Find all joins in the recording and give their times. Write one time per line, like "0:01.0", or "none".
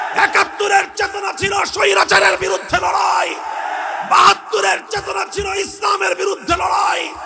none